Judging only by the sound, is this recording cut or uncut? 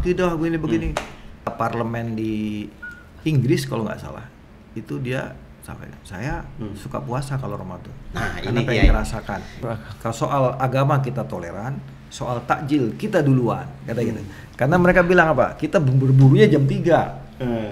cut